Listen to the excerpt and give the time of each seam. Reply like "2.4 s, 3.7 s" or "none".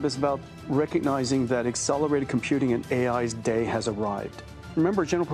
none